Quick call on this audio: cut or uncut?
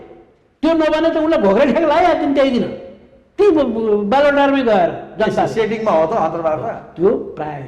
uncut